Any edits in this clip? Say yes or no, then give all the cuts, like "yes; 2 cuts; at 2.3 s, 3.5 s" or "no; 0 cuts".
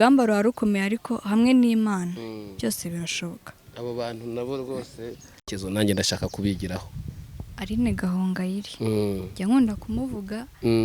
yes; 1 cut; at 5.5 s